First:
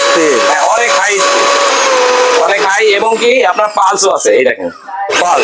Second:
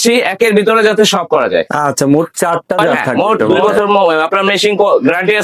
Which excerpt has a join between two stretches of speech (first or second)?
second